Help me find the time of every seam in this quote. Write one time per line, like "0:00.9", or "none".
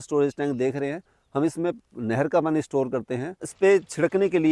0:03.5